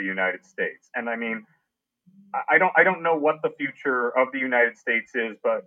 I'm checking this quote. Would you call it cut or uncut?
uncut